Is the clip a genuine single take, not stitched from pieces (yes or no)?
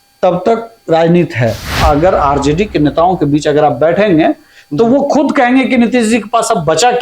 no